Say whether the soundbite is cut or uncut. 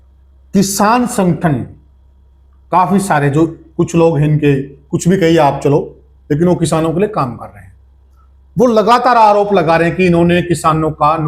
uncut